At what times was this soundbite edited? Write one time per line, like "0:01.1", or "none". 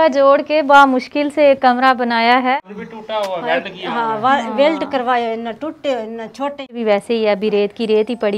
0:02.5
0:06.8